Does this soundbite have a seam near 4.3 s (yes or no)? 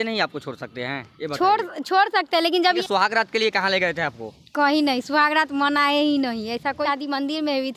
no